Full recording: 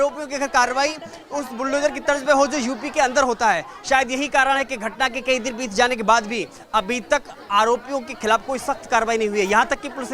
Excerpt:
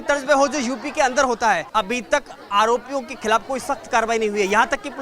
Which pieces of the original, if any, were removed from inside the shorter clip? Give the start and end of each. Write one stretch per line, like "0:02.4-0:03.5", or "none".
0:03.6-0:06.6